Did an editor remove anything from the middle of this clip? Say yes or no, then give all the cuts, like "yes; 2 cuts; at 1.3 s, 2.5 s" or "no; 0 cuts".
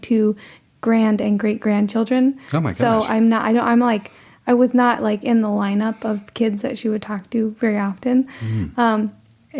no; 0 cuts